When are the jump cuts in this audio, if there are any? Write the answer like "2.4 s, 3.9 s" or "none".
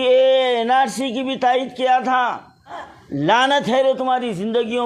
2.8 s